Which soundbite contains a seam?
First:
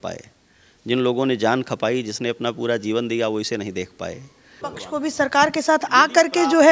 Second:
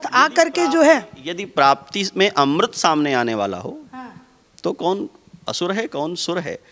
first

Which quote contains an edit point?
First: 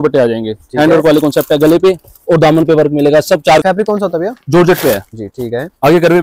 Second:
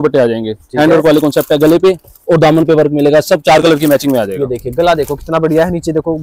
first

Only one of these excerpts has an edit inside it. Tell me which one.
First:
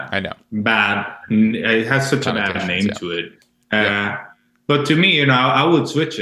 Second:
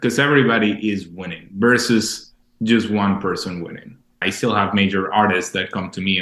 second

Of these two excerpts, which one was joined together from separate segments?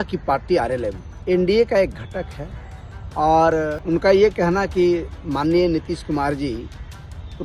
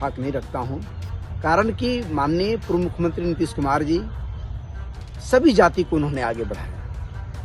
first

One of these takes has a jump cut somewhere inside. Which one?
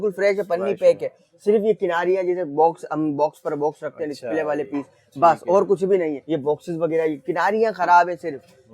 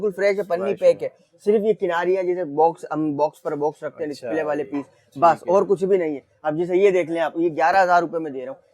first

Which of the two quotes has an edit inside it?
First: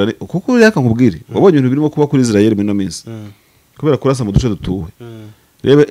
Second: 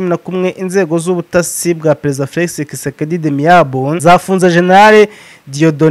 second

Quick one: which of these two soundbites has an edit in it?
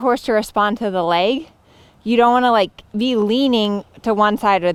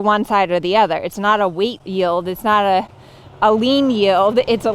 second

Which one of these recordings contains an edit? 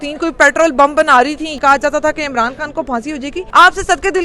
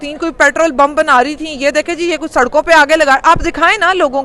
first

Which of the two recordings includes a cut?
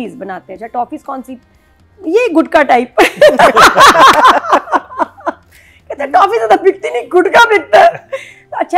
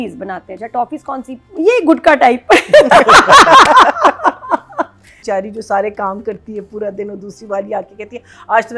second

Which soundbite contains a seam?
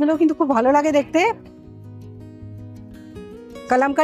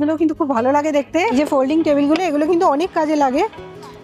second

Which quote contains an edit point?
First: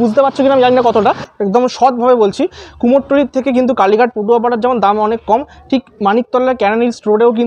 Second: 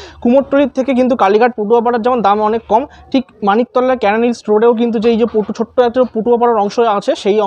first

